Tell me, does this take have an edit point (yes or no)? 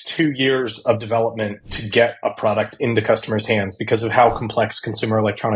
no